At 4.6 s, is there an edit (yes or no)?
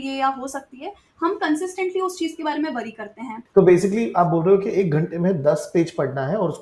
no